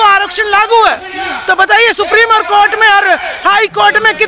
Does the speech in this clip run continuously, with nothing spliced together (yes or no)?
yes